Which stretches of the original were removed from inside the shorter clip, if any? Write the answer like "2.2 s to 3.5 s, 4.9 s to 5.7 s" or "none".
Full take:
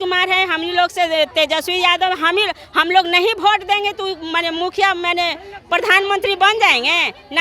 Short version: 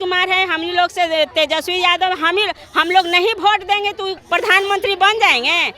4.2 s to 5.6 s